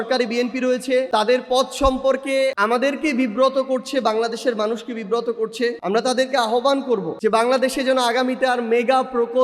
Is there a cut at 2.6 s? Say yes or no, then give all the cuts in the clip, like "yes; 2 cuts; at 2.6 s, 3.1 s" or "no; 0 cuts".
yes; 4 cuts; at 1.1 s, 2.6 s, 5.8 s, 7.1 s